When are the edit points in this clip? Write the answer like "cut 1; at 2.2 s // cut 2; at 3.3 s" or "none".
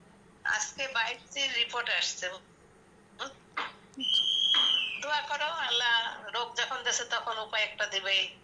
none